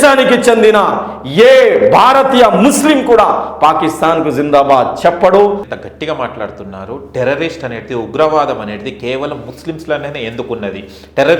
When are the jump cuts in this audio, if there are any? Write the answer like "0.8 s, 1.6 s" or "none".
5.6 s